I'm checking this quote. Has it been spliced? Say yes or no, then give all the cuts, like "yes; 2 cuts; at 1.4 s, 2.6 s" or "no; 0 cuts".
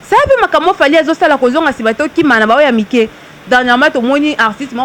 no; 0 cuts